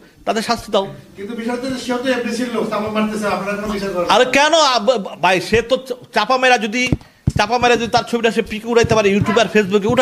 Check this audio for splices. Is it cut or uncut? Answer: uncut